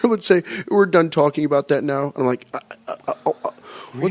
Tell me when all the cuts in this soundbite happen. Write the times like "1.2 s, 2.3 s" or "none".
2.0 s